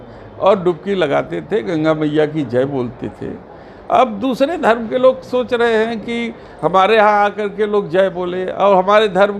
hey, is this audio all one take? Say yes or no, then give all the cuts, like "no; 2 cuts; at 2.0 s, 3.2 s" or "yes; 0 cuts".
yes; 0 cuts